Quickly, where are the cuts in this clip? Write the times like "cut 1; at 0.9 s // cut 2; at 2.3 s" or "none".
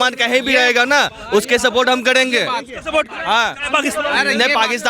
none